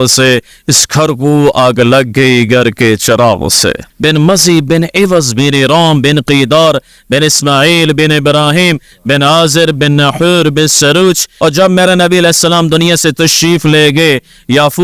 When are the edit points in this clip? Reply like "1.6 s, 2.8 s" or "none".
3.9 s, 11.3 s